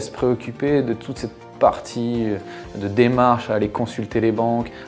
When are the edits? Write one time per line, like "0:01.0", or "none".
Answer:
none